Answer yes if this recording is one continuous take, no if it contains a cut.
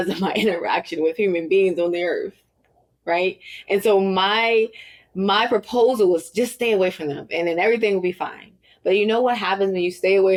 yes